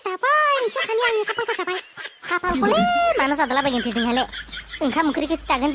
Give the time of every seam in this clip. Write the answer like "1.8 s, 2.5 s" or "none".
none